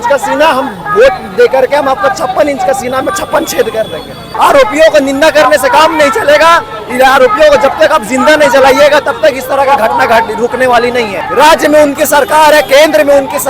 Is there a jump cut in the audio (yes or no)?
yes